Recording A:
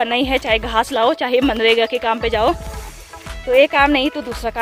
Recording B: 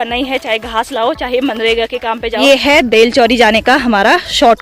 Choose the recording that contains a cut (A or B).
B